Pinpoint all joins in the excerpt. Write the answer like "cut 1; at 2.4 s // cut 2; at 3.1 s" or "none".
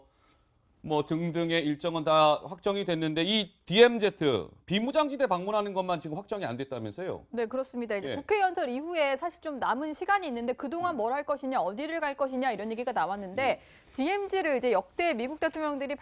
cut 1; at 13.7 s

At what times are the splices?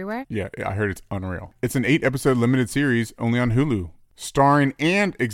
cut 1; at 4.0 s

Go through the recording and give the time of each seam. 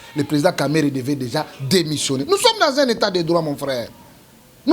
none

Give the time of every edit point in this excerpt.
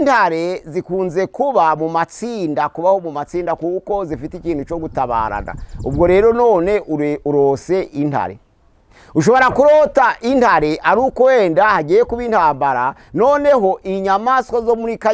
none

